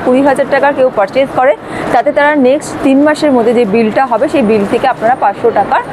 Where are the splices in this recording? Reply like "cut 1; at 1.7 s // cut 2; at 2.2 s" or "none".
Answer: none